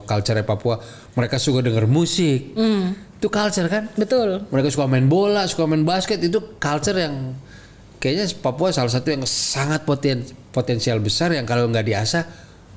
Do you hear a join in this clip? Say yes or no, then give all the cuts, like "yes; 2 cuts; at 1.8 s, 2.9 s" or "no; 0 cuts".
no; 0 cuts